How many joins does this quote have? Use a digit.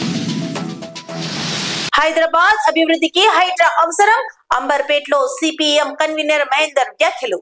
1